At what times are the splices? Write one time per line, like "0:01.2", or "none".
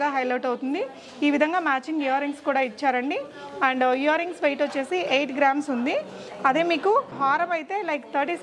none